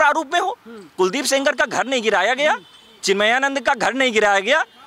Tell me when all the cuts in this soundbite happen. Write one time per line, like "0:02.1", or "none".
none